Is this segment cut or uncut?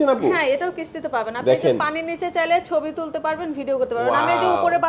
uncut